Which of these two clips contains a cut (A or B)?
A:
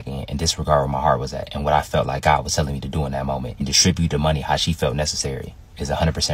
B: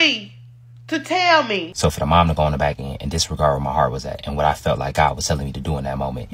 B